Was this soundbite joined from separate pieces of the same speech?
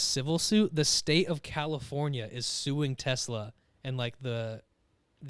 no; 0 cuts

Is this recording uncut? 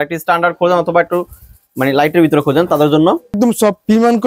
no; 1 cut; at 3.3 s

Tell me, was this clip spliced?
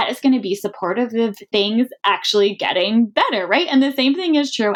no; 0 cuts

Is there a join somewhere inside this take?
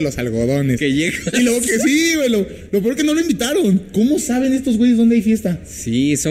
no; 0 cuts

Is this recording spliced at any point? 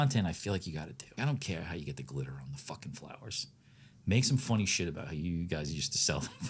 yes; 1 cut; at 1.2 s

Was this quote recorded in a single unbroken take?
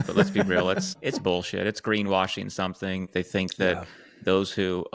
no; 2 cuts; at 1.0 s, 3.1 s

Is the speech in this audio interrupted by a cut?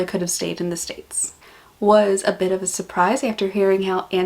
yes; 1 cut; at 1.4 s

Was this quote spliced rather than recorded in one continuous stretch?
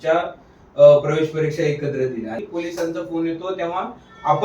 yes; 1 cut; at 2.4 s

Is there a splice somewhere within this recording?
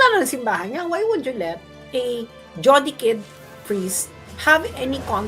no; 0 cuts

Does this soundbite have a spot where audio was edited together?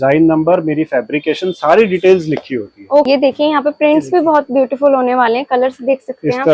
yes; 1 cut; at 3.1 s

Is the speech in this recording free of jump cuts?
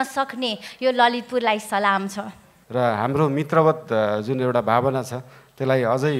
no; 1 cut; at 2.5 s

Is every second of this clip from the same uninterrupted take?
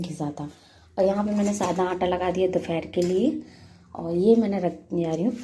yes; 0 cuts

